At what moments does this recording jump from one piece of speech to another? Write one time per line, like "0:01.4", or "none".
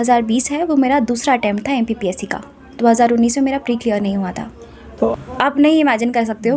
0:04.9